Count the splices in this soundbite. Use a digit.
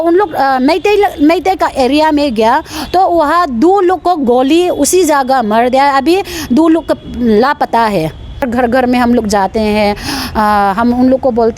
1